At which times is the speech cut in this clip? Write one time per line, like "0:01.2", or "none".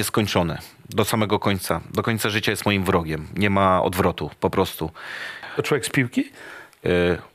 0:05.4